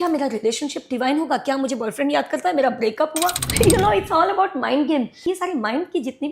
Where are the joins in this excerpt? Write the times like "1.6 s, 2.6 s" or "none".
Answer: 3.4 s, 5.2 s